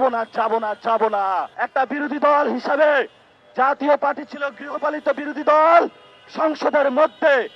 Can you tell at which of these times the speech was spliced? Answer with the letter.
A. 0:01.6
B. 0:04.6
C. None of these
A